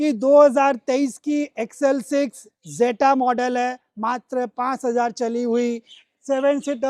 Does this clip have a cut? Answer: no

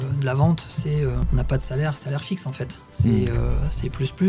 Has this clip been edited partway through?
yes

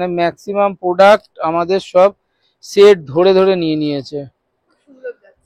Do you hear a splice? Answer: no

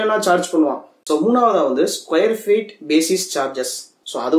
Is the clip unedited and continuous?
yes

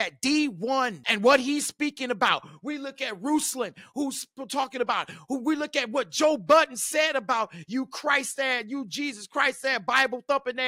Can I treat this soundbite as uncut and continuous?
no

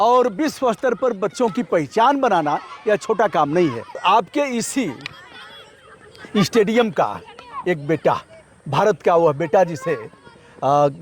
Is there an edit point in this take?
yes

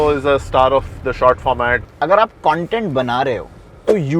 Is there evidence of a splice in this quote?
yes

